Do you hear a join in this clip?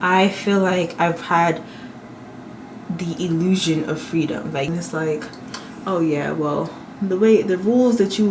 yes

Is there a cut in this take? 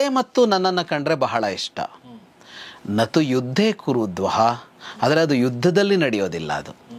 no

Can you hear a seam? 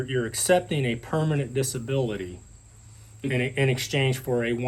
no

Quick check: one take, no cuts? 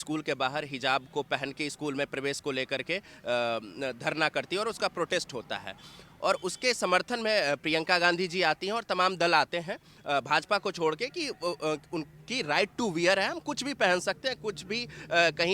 yes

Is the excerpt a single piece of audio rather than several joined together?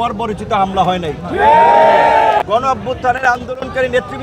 yes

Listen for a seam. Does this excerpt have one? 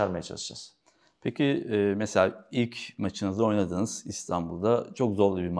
no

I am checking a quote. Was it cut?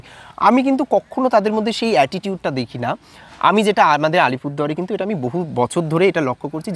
no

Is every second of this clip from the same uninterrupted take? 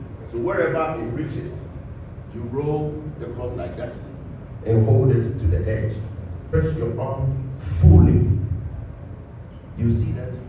no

